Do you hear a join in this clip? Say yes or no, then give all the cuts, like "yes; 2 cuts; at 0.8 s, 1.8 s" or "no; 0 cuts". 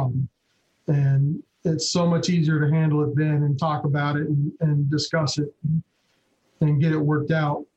no; 0 cuts